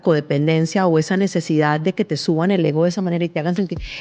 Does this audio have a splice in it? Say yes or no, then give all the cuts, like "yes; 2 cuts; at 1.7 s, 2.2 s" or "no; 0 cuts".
no; 0 cuts